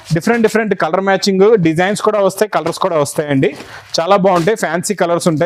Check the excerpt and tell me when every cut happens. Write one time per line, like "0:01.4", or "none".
none